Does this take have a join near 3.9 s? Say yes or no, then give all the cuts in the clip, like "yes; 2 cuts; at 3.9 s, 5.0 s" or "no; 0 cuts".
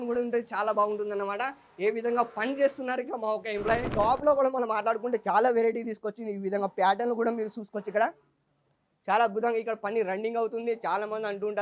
yes; 1 cut; at 3.9 s